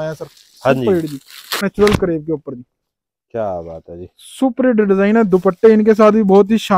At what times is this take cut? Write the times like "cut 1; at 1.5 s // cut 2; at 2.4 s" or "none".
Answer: cut 1; at 1.6 s